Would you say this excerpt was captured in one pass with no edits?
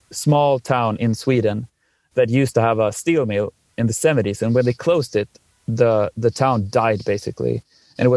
yes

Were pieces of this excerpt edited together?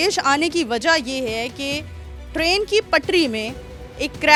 no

